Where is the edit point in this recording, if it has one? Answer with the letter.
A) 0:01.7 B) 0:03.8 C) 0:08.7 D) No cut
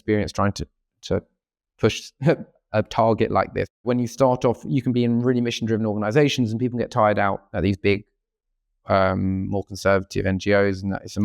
B